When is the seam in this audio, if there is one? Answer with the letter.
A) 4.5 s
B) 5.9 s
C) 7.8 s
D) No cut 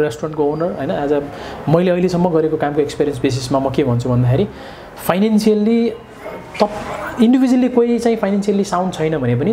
D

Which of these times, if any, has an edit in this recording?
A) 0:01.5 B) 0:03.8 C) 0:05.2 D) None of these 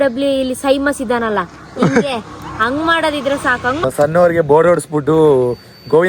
B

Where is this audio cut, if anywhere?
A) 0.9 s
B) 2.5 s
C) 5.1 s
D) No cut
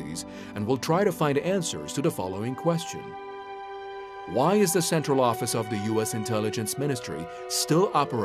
A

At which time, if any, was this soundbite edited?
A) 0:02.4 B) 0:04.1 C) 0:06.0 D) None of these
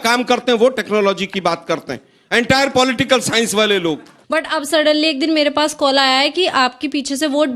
B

